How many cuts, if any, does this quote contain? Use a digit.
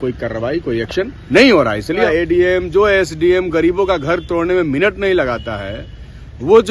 1